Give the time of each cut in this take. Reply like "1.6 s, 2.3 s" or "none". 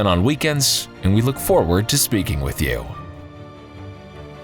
2.9 s